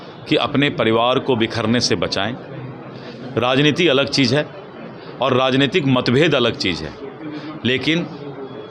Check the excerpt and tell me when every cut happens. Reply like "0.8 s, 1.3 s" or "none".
none